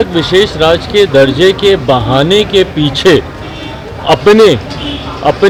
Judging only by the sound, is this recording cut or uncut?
uncut